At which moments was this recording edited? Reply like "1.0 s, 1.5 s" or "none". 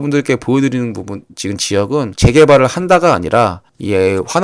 2.1 s